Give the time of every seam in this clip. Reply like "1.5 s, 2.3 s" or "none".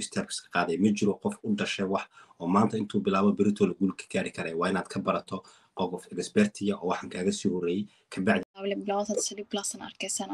8.6 s